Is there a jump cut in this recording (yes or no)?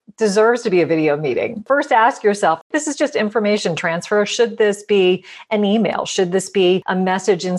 yes